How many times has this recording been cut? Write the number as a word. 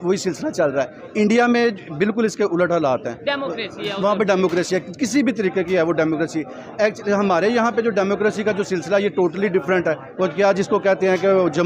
zero